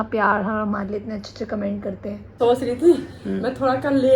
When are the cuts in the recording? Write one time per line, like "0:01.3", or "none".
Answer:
0:02.4